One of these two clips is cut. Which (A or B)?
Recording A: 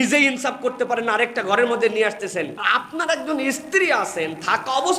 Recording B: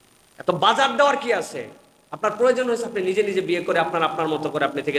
A